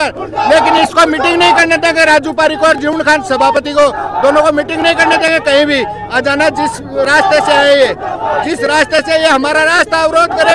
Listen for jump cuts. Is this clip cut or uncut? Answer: uncut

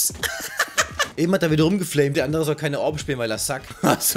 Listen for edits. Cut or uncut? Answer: cut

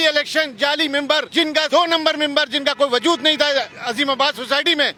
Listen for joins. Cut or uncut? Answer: uncut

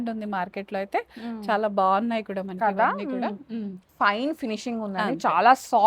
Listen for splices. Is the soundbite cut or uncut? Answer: cut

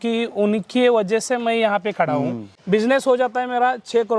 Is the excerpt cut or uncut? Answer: cut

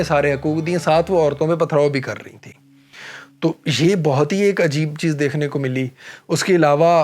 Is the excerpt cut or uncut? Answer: uncut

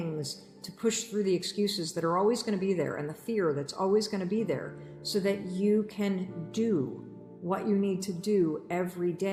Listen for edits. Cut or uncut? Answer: uncut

